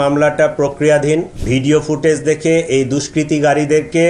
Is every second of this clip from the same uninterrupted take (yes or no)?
no